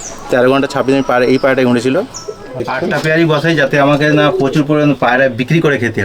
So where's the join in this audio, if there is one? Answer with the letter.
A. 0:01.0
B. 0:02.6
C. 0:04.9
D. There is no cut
B